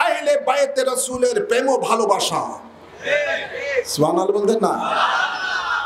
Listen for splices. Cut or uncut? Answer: uncut